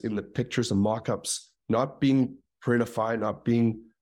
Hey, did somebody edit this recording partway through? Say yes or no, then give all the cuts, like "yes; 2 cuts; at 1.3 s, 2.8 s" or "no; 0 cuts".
no; 0 cuts